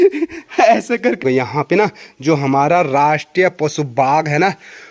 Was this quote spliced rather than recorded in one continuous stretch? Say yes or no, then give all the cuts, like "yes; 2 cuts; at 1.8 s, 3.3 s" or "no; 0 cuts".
yes; 1 cut; at 1.2 s